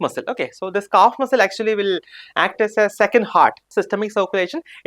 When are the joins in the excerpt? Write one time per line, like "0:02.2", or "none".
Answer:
0:03.7